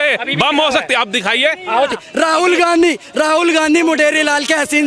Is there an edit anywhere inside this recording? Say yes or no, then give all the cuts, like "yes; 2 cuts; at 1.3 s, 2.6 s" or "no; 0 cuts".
yes; 1 cut; at 1.9 s